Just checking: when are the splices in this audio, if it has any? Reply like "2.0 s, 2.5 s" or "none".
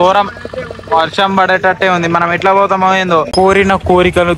3.3 s